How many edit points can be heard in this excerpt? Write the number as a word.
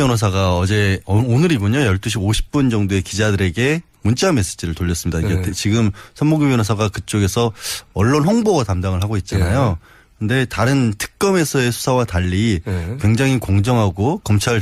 one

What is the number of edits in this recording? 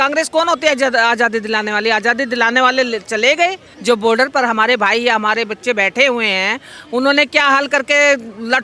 one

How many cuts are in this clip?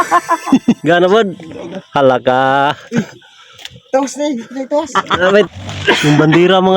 two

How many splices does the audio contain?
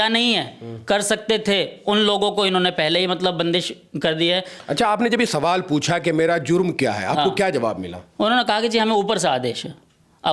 one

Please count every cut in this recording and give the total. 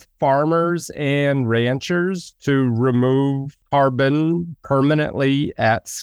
two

